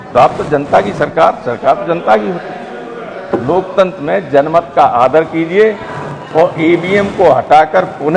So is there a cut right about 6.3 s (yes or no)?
no